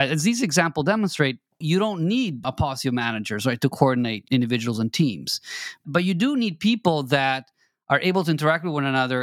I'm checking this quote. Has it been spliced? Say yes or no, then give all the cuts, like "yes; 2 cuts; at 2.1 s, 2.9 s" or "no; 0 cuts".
yes; 4 cuts; at 1.6 s, 2.4 s, 4.2 s, 5.8 s